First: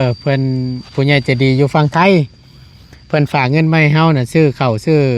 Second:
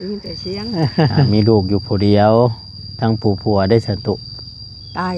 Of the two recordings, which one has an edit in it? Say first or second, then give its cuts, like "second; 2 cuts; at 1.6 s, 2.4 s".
second; 1 cut; at 1.3 s